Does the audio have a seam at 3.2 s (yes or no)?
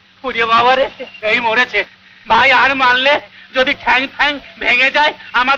no